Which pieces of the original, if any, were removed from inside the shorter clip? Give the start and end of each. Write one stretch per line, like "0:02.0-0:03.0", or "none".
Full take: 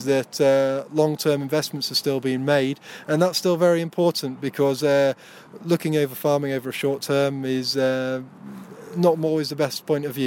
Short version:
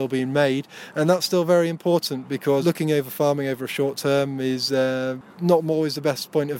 0:04.7-0:05.7
0:08.3-0:08.8